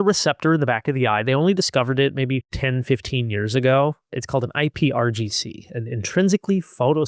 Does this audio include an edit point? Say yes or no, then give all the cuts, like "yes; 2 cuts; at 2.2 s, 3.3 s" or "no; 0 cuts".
no; 0 cuts